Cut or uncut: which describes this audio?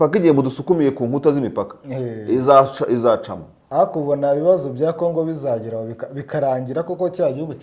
cut